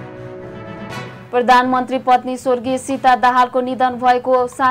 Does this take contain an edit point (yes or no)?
yes